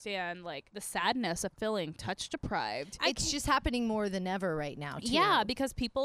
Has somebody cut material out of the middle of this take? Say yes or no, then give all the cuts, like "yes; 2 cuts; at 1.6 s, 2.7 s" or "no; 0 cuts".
no; 0 cuts